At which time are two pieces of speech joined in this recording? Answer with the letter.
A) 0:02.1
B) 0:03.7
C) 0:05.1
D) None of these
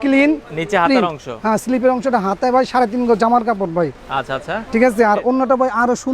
D